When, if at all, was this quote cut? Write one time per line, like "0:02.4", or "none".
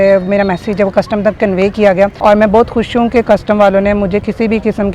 0:02.1

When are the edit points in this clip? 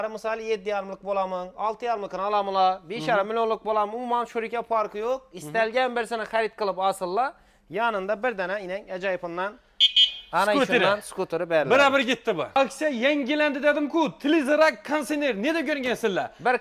0:12.5

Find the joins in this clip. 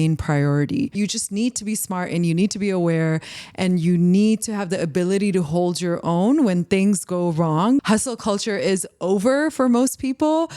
0:01.0
0:07.8

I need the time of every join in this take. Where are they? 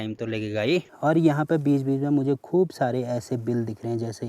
0:00.9

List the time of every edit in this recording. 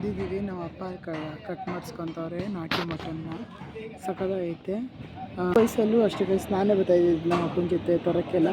0:05.5

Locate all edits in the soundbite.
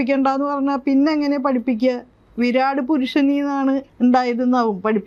0:03.9

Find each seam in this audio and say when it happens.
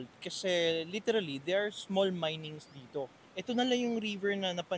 0:03.2

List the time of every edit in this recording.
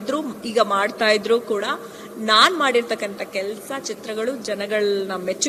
none

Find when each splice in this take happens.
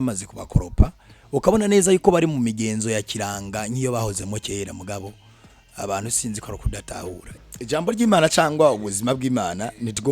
0:07.3

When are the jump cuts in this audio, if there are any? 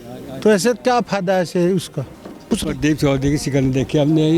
0:02.5

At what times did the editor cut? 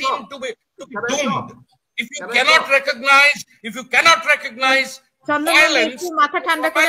none

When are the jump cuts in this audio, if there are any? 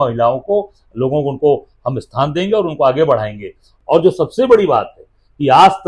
0:03.7

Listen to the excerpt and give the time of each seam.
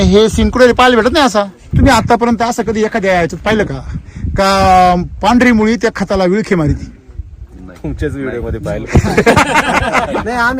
0:01.7

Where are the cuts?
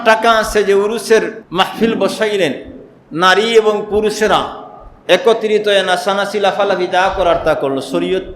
0:01.4

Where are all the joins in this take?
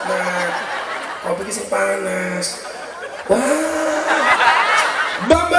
none

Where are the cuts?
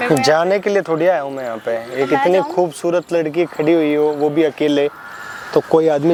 none

